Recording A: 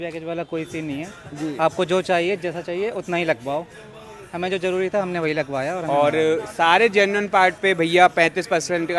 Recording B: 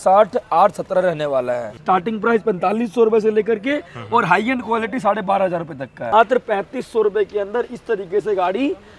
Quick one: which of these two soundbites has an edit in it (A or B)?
B